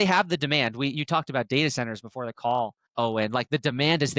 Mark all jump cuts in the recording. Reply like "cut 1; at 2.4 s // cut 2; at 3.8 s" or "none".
cut 1; at 2.8 s